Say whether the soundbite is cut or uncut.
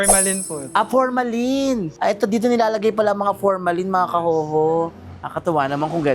uncut